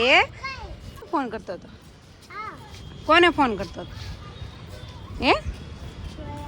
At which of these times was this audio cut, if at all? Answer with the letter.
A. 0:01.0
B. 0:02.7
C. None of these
A